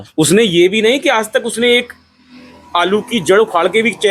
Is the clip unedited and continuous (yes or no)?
yes